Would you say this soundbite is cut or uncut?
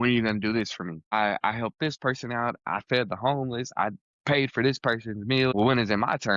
cut